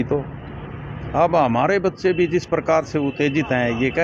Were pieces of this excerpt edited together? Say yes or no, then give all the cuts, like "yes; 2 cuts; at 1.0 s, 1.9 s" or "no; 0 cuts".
no; 0 cuts